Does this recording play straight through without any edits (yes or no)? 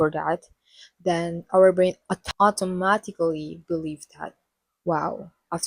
no